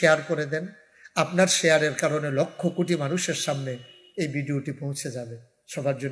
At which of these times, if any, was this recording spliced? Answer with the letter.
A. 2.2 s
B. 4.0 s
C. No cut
C